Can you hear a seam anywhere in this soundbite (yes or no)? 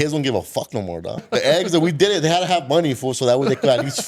yes